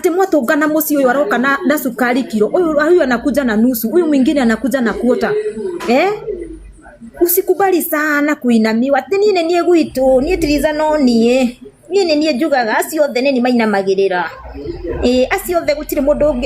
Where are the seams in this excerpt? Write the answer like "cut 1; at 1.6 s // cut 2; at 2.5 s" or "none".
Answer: none